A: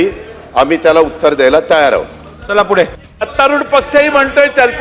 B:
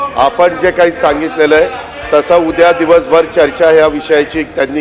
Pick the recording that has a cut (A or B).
A